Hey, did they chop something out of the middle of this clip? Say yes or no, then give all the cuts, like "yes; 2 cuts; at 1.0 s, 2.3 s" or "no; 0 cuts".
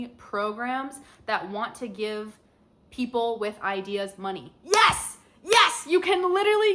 no; 0 cuts